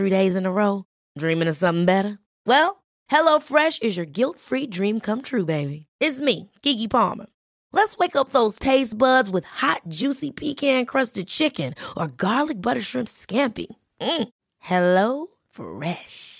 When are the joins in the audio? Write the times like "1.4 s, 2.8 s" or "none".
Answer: none